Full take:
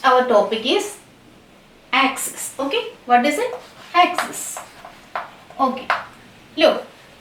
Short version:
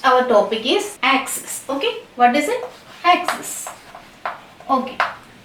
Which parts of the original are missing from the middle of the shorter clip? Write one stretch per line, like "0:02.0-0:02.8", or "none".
0:00.9-0:01.8